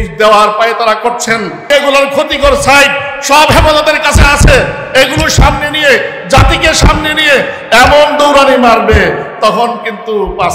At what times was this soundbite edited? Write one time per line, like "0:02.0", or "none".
0:01.6